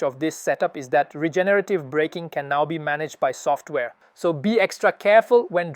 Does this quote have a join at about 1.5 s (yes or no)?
no